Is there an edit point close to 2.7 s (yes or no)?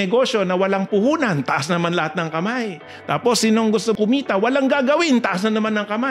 no